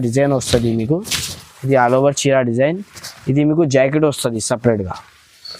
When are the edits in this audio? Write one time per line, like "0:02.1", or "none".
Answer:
none